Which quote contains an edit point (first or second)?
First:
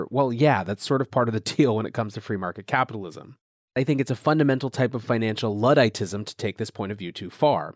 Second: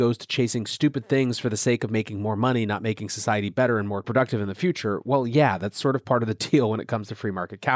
first